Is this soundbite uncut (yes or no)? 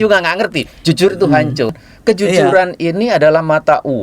no